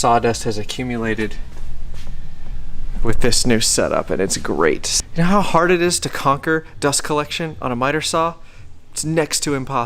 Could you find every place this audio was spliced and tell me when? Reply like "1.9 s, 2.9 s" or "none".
5.0 s

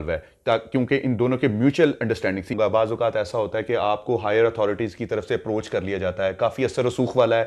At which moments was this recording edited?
2.5 s

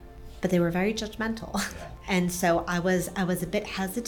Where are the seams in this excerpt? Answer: 2.0 s

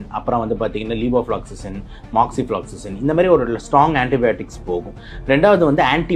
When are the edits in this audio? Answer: none

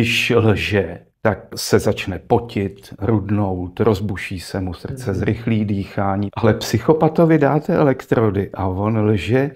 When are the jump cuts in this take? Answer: 1.5 s, 6.3 s

